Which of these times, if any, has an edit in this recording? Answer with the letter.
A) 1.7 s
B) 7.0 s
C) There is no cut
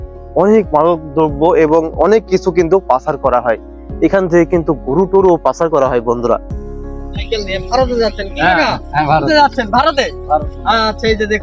B